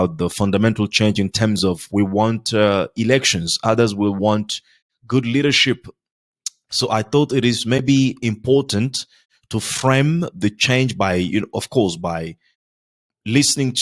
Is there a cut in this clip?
no; 0 cuts

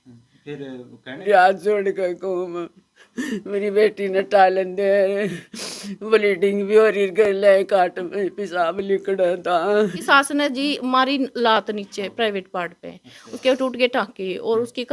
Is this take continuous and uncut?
no; 2 cuts; at 1.2 s, 10.0 s

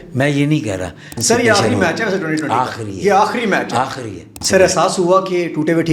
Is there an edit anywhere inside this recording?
yes; 2 cuts; at 1.2 s, 4.3 s

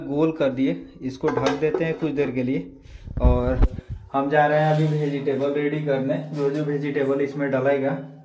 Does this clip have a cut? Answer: no; 0 cuts

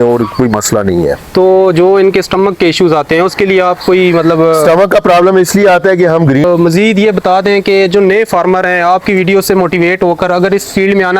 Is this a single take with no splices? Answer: no; 1 cut; at 6.4 s

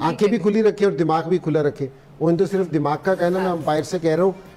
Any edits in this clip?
no; 0 cuts

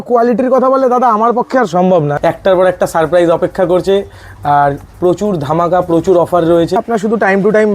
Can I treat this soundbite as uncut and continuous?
no; 2 cuts; at 2.2 s, 6.8 s

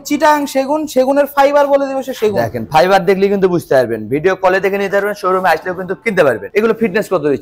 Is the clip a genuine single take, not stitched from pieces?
yes; 0 cuts

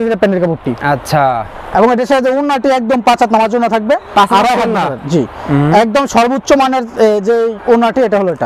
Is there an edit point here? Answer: no; 0 cuts

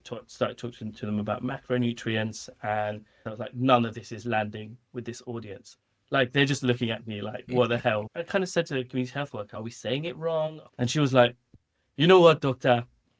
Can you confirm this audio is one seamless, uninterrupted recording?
no; 4 cuts; at 3.2 s, 8.0 s, 9.6 s, 10.7 s

